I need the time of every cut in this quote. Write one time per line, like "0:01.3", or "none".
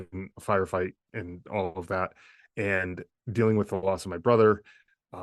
0:01.0